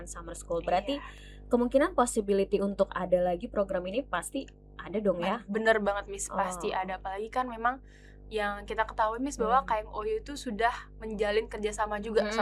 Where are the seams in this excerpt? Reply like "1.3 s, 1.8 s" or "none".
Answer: none